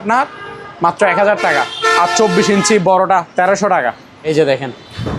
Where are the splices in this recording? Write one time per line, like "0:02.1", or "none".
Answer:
0:04.1